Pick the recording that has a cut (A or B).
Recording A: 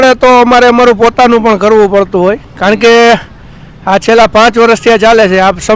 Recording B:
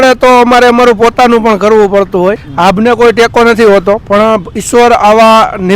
B